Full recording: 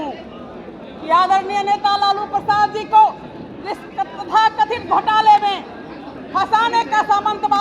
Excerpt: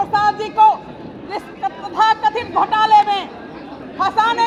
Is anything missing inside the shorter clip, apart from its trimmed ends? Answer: no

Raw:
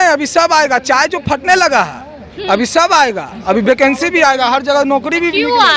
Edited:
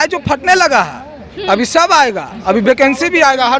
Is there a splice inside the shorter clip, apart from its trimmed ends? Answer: no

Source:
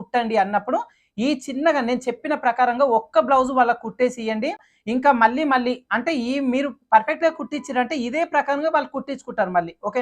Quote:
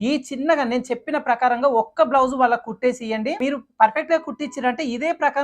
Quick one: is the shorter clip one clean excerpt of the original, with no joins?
no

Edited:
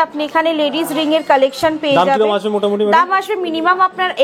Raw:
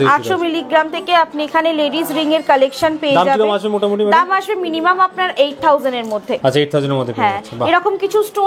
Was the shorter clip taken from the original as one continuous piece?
yes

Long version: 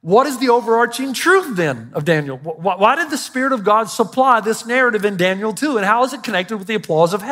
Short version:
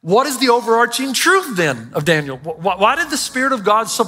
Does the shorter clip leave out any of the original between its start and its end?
no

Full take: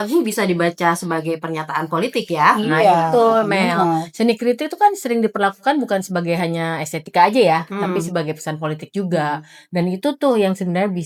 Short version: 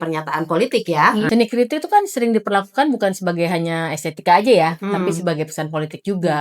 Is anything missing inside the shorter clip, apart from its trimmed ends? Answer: yes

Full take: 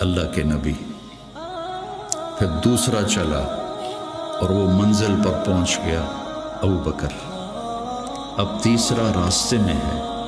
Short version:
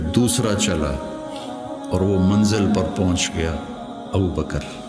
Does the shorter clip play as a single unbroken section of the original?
yes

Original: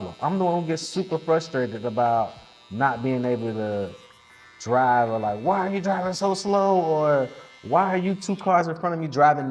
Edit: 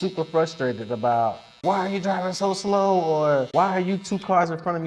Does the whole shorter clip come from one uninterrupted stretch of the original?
no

